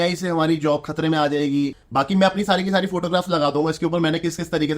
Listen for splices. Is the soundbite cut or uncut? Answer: cut